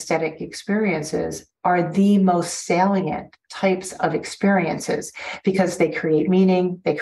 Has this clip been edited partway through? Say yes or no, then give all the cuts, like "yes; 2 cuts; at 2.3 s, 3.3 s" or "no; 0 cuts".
no; 0 cuts